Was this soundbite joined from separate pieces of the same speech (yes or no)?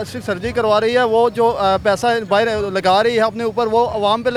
no